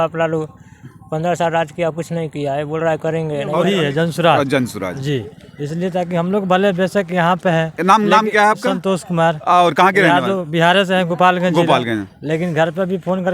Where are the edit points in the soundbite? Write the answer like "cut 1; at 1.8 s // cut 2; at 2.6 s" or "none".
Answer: cut 1; at 3.6 s